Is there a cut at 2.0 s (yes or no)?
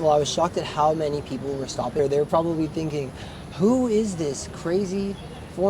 yes